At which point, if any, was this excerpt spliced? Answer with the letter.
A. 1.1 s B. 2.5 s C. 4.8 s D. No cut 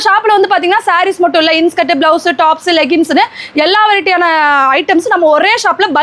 D